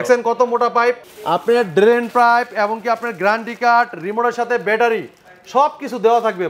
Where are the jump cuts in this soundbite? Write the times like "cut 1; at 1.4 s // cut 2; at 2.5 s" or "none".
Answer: cut 1; at 1.1 s